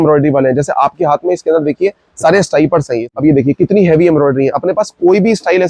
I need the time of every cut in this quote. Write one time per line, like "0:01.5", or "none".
0:03.0